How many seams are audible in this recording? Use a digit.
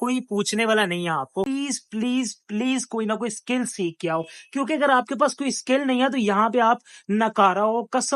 1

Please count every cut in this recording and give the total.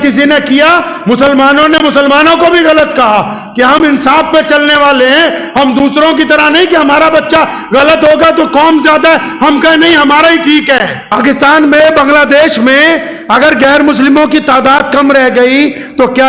1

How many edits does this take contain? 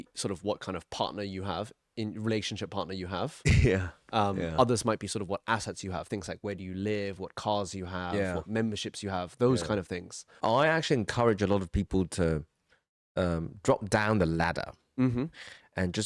1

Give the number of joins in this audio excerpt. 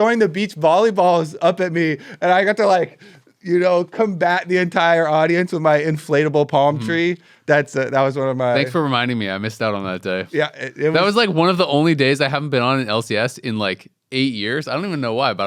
0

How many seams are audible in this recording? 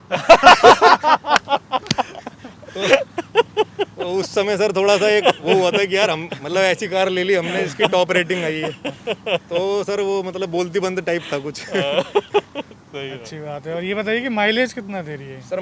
0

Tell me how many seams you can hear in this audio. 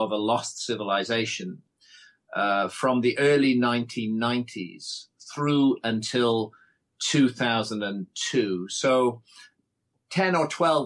0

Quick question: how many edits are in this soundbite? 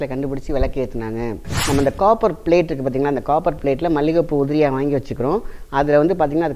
1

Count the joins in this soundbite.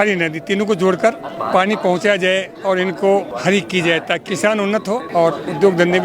3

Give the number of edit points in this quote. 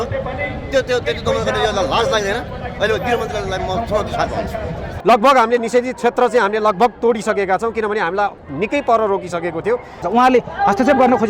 2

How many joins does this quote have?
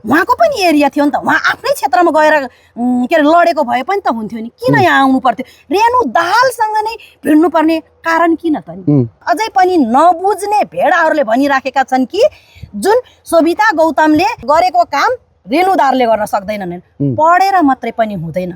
2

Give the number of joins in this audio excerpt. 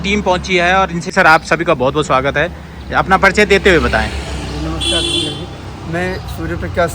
1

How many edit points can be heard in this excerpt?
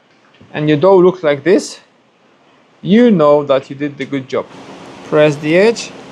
1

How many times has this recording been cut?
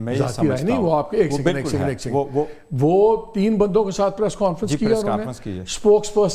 0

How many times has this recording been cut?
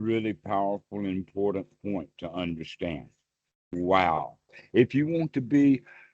1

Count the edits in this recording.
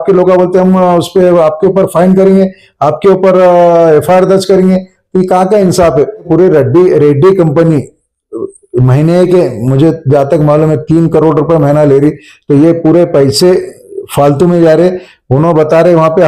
1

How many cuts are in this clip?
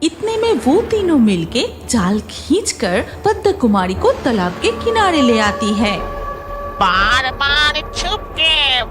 1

